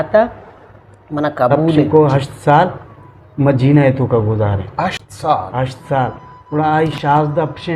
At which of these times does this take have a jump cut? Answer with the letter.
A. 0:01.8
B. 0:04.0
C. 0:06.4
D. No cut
A